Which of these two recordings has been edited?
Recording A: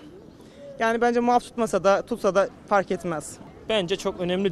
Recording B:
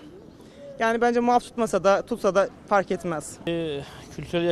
A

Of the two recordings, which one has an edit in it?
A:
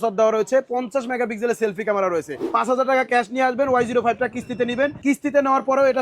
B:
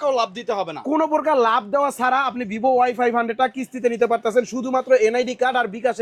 A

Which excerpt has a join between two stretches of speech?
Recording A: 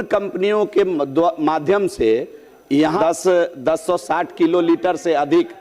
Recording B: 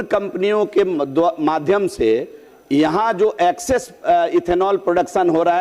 A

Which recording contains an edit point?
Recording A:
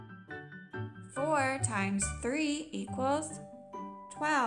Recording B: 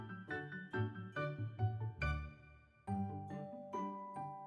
A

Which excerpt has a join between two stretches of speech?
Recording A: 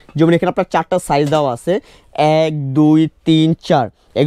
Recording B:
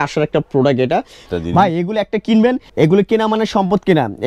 B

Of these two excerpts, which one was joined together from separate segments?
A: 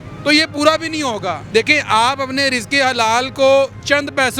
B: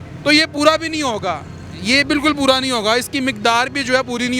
A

